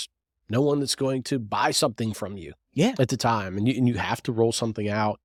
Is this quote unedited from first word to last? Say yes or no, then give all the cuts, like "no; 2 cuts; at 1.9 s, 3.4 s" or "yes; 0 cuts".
yes; 0 cuts